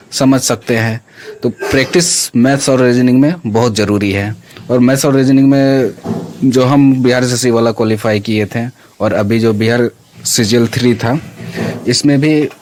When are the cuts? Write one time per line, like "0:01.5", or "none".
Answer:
none